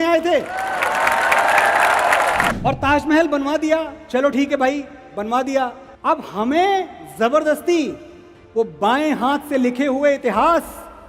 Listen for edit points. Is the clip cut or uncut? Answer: cut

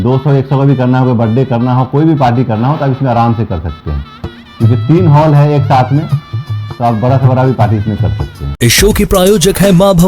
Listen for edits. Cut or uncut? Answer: uncut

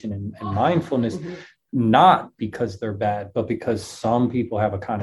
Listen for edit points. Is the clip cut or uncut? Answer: uncut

